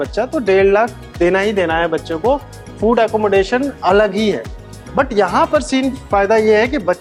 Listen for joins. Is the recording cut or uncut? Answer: uncut